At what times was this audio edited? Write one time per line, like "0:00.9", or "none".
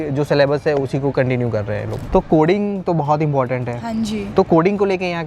0:02.0